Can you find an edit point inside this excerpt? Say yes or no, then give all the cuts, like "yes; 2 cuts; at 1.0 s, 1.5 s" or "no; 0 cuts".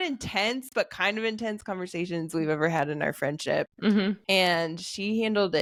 no; 0 cuts